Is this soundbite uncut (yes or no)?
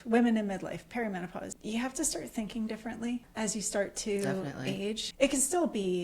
no